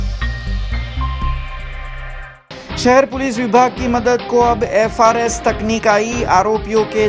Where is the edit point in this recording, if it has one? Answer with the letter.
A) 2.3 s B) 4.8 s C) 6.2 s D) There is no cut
D